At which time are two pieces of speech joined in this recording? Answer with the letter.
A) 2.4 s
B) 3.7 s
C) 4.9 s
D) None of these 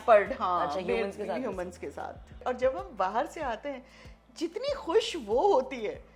A